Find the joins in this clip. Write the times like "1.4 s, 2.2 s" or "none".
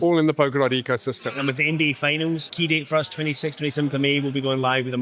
1.3 s, 2.5 s